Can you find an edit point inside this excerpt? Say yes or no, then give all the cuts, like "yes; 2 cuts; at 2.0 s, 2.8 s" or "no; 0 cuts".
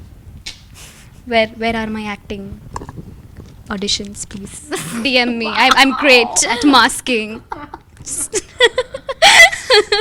no; 0 cuts